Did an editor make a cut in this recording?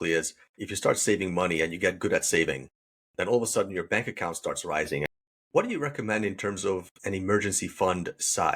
yes; 1 cut; at 5.1 s

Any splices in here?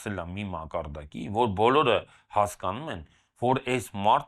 no; 0 cuts

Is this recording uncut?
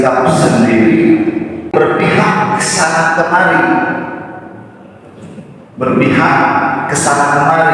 no; 1 cut; at 1.7 s

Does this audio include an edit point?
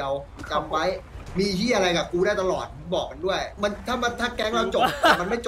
yes; 1 cut; at 3.6 s

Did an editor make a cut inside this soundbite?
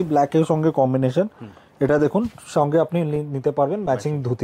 no; 0 cuts

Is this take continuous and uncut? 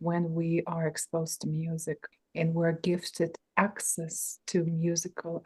no; 1 cut; at 2.1 s

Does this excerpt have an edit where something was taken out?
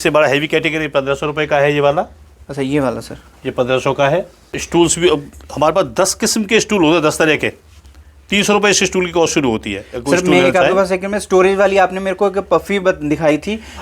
no; 0 cuts

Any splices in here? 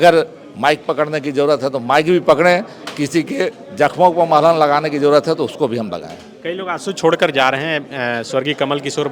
no; 0 cuts

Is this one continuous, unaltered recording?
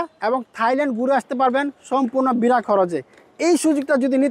yes; 0 cuts

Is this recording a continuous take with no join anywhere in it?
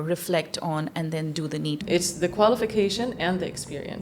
no; 1 cut; at 1.8 s

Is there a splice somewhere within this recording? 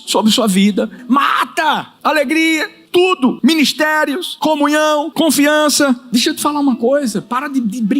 yes; 6 cuts; at 1.0 s, 1.9 s, 3.1 s, 4.3 s, 5.1 s, 6.0 s

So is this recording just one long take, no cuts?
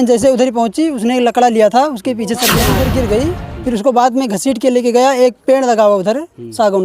no; 1 cut; at 2.7 s

